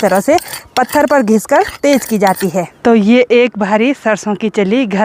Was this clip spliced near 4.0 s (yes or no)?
no